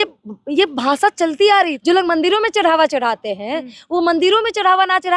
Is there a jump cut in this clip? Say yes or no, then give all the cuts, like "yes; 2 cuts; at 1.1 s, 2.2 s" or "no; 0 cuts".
yes; 1 cut; at 1.8 s